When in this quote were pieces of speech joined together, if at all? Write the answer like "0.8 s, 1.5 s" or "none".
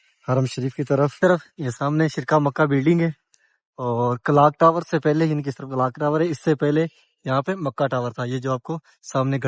none